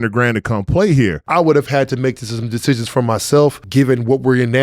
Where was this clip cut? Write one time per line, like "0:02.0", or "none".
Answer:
0:01.2
0:03.6